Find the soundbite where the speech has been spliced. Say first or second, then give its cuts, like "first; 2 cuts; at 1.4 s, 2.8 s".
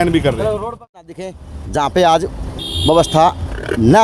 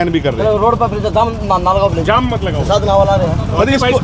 first; 1 cut; at 1.1 s